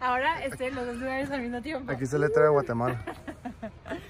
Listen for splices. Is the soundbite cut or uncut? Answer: uncut